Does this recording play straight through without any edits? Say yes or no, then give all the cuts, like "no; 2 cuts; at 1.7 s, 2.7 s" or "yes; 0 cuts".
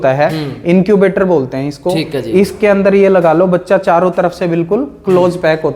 yes; 0 cuts